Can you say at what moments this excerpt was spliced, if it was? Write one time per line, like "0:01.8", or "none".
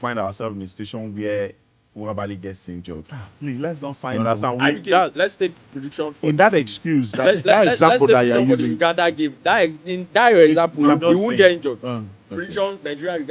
none